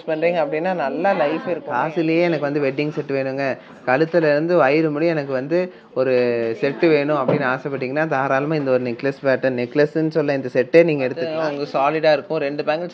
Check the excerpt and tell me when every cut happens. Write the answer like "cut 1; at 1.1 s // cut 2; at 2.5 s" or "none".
cut 1; at 1.6 s // cut 2; at 11.2 s